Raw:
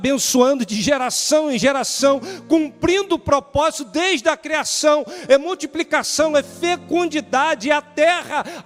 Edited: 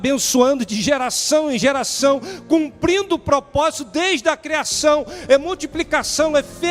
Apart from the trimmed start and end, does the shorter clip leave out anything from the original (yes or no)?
no